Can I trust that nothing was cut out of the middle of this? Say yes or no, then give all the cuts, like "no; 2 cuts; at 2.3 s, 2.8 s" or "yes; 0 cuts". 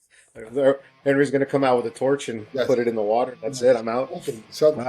yes; 0 cuts